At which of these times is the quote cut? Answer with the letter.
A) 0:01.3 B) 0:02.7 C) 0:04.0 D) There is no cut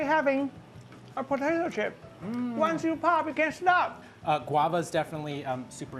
D